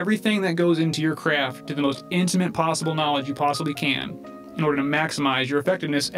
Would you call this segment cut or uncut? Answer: uncut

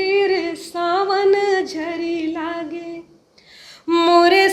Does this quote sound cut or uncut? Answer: uncut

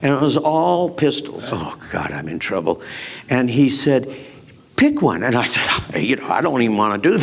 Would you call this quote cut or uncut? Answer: cut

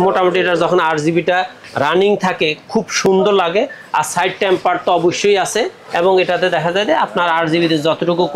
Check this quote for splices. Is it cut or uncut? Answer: uncut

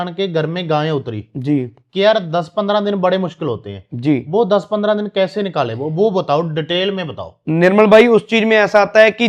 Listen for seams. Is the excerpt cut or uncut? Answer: uncut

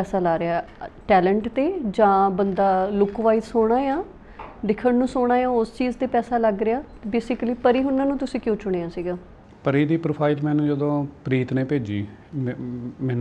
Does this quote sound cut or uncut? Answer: uncut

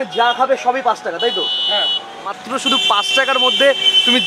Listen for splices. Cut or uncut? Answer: cut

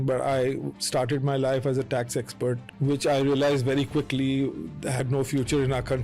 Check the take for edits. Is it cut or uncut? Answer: cut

